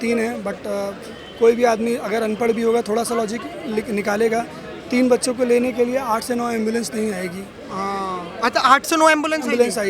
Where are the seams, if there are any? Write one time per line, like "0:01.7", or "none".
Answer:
none